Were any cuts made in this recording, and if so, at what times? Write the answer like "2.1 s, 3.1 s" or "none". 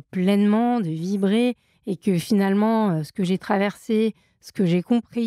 none